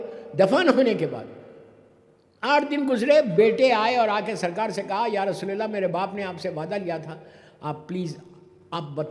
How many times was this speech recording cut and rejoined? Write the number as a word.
zero